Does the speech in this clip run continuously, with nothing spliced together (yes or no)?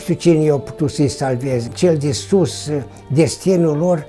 no